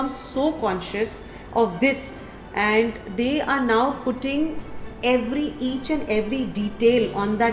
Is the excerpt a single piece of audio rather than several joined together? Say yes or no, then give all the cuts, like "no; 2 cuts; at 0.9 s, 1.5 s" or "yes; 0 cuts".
yes; 0 cuts